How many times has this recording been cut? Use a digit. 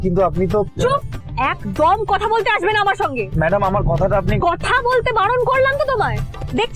1